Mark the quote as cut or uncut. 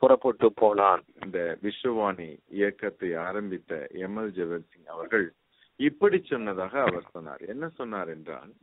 cut